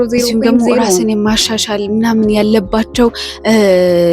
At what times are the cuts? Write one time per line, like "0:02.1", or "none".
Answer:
0:01.0